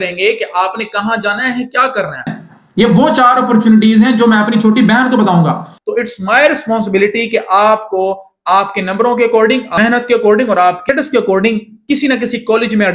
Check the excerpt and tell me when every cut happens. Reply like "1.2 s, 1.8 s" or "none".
2.4 s, 5.7 s, 9.7 s, 10.8 s

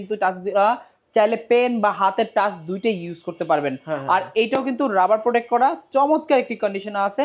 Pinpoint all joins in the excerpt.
none

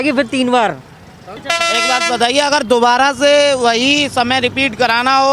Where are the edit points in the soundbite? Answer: 1.3 s

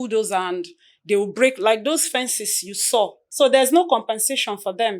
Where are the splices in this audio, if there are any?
3.2 s

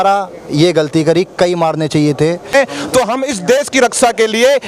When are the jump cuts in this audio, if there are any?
2.5 s

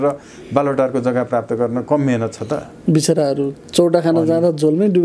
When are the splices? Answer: none

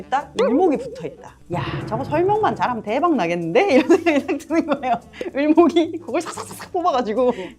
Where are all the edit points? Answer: 1.4 s, 5.2 s

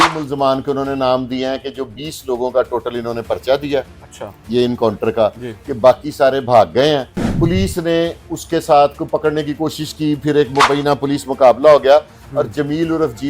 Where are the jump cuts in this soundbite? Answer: 7.2 s

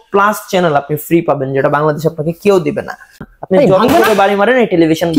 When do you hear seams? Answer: 3.3 s

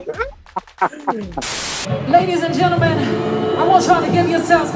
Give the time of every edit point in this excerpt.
1.8 s

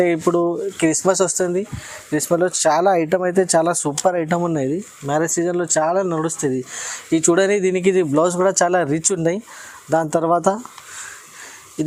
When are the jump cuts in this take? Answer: none

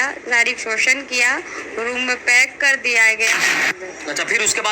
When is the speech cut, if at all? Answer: 3.7 s

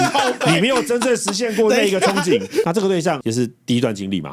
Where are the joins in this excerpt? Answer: 2.7 s

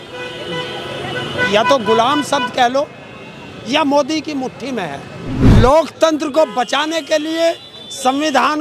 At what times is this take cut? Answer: 5.3 s

